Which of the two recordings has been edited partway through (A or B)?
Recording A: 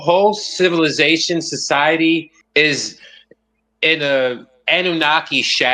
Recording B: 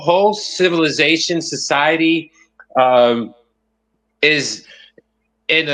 A